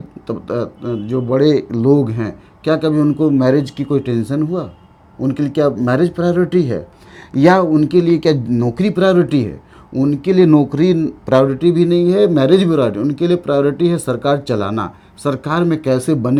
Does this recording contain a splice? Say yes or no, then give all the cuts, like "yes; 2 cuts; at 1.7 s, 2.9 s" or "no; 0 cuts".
no; 0 cuts